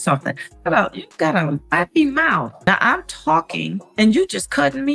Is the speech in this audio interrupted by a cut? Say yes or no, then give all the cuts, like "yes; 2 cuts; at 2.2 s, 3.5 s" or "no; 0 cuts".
yes; 1 cut; at 2.5 s